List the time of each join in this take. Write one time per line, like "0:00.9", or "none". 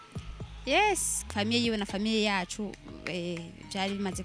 0:01.2